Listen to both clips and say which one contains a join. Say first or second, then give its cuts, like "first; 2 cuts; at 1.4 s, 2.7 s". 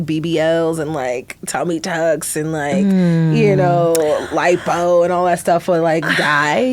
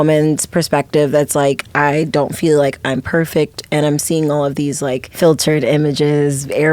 second; 1 cut; at 5.1 s